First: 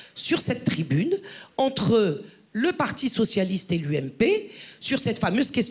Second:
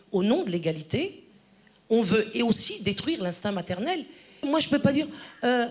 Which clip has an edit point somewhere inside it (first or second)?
second